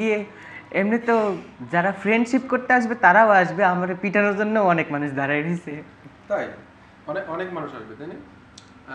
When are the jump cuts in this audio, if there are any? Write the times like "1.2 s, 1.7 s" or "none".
none